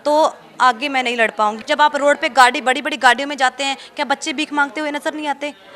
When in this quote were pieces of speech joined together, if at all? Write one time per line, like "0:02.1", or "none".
0:01.6